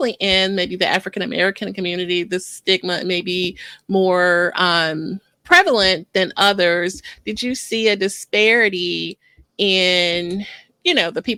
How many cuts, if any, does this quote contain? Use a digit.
0